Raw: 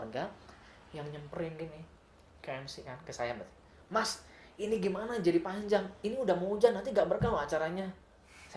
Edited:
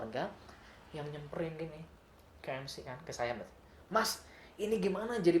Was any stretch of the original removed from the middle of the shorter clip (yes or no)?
no